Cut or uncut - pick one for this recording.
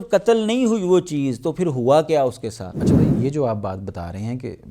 cut